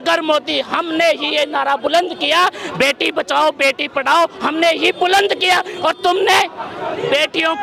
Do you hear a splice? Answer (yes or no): no